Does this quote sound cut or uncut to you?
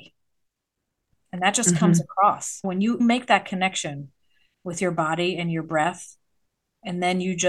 uncut